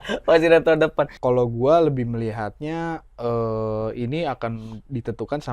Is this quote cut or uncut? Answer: cut